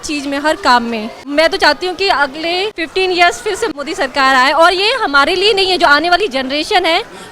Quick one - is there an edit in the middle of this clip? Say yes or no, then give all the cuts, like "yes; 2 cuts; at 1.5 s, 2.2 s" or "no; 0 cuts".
yes; 3 cuts; at 1.2 s, 2.8 s, 3.7 s